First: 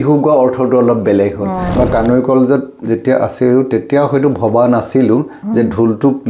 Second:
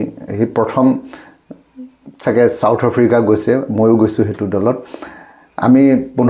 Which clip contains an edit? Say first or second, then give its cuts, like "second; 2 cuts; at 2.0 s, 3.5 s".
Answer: first; 1 cut; at 1.7 s